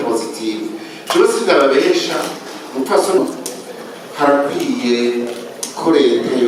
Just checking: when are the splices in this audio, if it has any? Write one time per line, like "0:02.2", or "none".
0:03.2